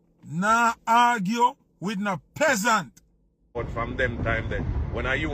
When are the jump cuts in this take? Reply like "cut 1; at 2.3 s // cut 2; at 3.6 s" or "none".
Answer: cut 1; at 3.6 s